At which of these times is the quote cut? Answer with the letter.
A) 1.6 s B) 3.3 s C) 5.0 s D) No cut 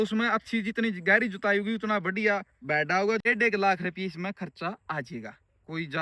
B